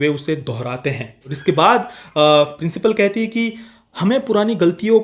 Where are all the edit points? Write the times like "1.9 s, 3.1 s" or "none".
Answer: 1.2 s